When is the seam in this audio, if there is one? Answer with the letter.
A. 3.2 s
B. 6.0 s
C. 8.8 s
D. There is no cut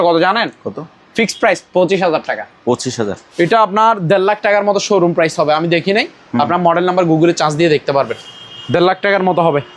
A